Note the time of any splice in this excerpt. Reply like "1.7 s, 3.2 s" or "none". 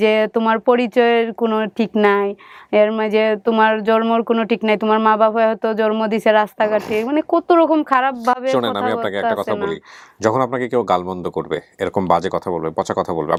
none